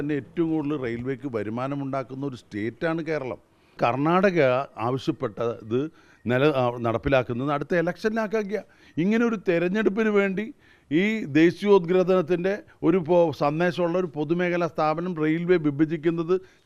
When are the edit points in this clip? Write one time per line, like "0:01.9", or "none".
0:03.8